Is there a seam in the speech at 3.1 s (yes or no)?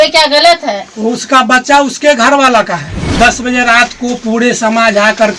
yes